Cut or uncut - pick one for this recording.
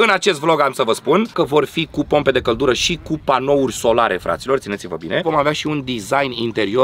cut